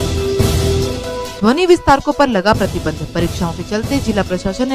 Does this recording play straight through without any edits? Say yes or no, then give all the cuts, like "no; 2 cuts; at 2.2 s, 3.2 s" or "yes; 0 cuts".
yes; 0 cuts